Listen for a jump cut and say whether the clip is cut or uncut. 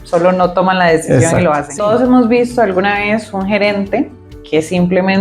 cut